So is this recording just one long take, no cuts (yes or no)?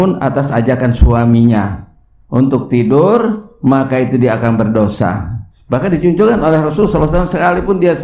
yes